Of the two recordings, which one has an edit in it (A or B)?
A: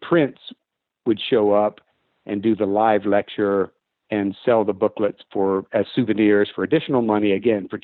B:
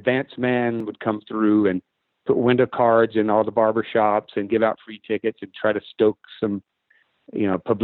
B